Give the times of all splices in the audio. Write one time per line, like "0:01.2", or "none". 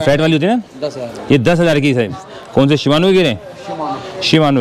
0:02.2